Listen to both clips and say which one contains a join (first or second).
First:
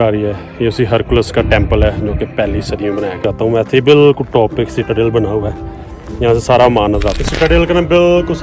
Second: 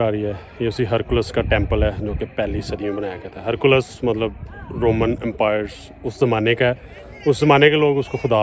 first